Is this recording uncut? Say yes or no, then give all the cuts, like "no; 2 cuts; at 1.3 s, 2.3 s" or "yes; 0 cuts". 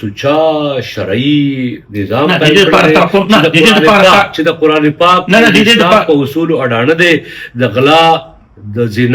yes; 0 cuts